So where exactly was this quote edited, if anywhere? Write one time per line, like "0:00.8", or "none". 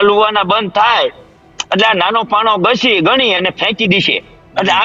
none